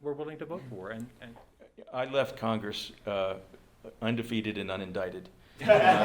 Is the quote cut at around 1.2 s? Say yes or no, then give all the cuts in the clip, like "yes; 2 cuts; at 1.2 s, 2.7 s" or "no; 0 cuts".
yes; 1 cut; at 1.2 s